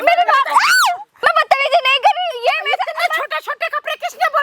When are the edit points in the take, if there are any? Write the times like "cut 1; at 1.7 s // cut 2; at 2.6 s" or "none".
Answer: cut 1; at 1.1 s